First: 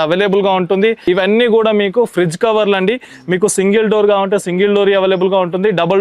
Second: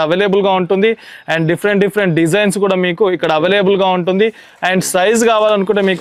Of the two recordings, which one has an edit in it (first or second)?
first